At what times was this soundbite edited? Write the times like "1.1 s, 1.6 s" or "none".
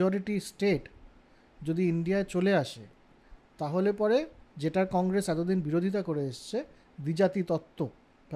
none